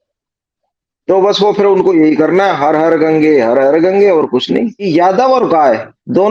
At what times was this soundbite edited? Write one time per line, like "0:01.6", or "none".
0:04.9